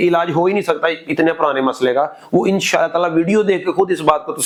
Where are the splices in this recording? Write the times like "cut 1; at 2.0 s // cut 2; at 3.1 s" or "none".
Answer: none